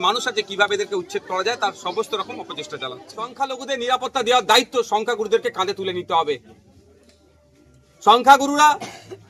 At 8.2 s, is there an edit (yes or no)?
no